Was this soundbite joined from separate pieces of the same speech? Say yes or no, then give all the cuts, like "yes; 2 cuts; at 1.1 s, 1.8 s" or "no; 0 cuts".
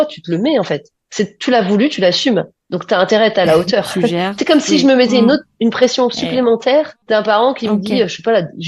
yes; 1 cut; at 7.0 s